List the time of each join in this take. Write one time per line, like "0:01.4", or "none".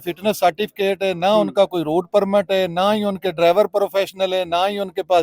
none